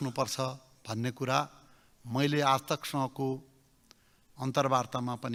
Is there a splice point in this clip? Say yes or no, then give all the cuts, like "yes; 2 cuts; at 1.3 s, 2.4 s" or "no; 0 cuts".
no; 0 cuts